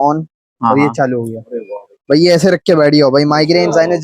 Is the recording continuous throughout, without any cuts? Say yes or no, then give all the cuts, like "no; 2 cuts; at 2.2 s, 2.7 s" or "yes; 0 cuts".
yes; 0 cuts